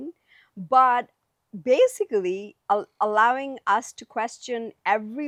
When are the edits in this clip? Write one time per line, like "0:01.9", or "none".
none